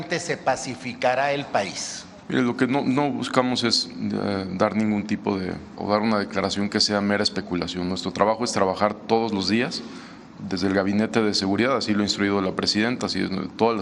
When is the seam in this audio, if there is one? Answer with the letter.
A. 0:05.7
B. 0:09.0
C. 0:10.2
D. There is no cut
A